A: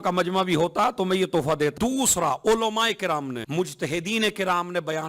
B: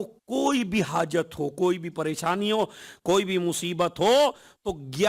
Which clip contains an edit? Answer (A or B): A